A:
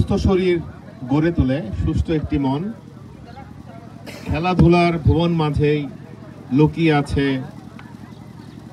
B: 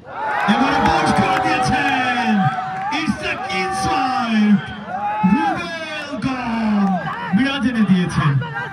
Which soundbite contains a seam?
B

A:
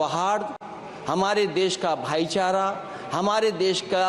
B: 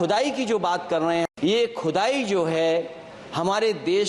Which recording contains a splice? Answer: B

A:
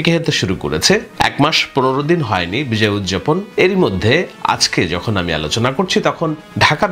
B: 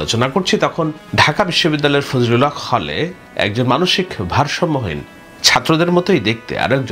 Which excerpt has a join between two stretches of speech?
A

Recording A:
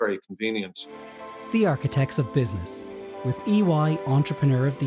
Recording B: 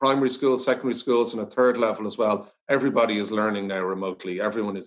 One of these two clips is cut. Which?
A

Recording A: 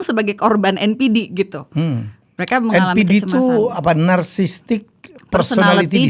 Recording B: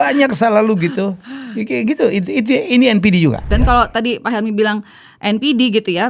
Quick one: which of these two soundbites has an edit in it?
B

